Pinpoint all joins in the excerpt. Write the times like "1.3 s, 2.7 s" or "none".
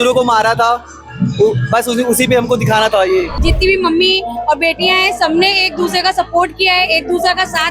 3.3 s